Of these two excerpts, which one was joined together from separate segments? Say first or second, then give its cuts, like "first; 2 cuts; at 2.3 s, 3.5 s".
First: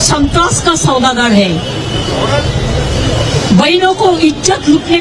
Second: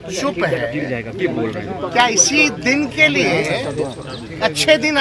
second; 1 cut; at 1.1 s